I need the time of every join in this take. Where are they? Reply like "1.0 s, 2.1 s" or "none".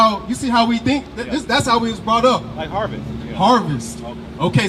none